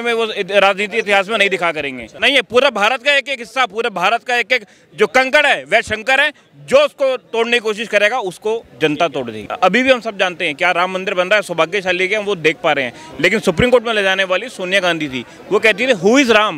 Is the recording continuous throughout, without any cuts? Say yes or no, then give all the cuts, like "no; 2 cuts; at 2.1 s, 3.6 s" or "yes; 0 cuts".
no; 2 cuts; at 2.1 s, 9.4 s